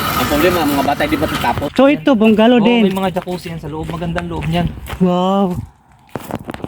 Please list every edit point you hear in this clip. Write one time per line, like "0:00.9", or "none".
0:01.6